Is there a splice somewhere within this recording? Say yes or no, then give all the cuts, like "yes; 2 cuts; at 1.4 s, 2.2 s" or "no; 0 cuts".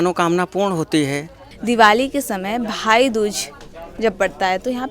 yes; 1 cut; at 1.5 s